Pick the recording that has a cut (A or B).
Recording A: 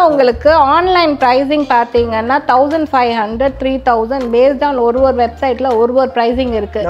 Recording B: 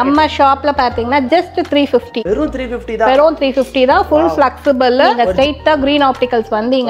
B